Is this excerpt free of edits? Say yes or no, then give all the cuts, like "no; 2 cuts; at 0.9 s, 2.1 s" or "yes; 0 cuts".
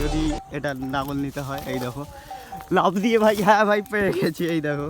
yes; 0 cuts